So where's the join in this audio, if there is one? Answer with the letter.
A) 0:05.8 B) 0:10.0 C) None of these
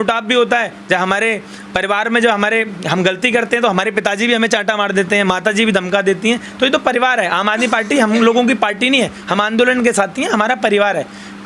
C